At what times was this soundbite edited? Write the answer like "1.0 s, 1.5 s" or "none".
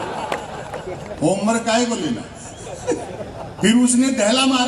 none